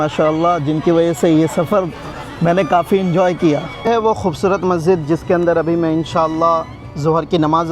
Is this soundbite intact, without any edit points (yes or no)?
no